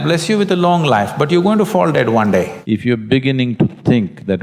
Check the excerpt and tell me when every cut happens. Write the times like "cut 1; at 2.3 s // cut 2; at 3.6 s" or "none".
cut 1; at 2.6 s